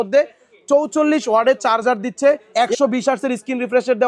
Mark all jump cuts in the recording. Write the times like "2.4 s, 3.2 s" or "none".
2.4 s